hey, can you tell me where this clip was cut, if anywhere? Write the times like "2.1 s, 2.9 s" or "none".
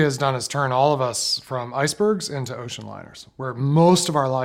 none